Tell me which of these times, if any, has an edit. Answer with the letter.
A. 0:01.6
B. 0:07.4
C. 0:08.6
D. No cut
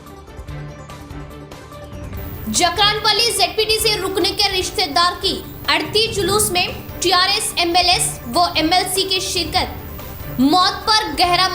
A